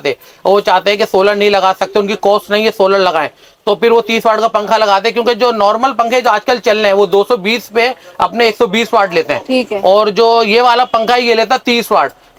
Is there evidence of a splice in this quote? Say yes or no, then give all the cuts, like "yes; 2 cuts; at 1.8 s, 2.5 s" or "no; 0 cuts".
no; 0 cuts